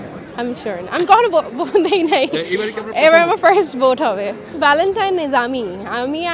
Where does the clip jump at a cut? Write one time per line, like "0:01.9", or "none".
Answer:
0:04.5